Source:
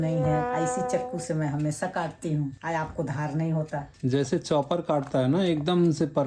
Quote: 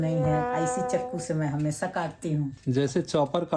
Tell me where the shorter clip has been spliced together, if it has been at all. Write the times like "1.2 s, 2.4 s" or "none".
2.6 s